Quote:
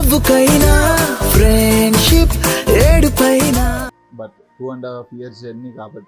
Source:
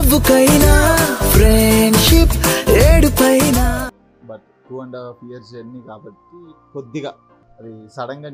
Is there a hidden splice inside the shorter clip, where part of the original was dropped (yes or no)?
yes